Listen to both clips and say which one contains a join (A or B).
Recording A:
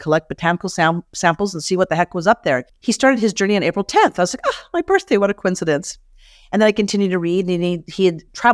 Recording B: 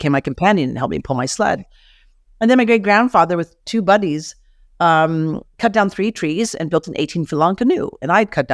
A